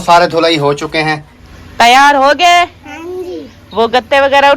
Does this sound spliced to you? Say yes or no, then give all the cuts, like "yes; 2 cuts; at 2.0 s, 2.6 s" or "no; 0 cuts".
yes; 1 cut; at 1.4 s